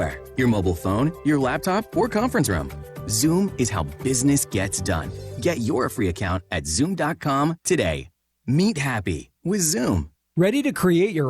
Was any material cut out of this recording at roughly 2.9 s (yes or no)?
no